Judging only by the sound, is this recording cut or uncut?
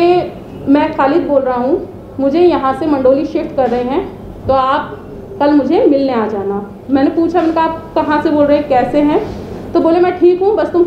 uncut